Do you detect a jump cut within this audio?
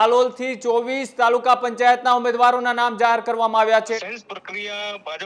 yes; 1 cut; at 4.0 s

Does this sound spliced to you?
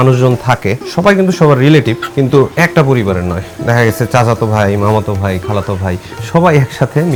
no; 0 cuts

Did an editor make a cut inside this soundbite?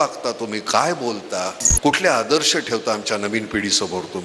yes; 1 cut; at 1.6 s

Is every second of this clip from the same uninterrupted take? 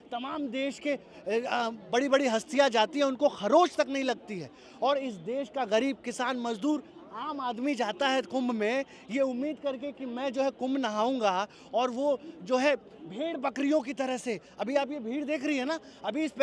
yes; 0 cuts

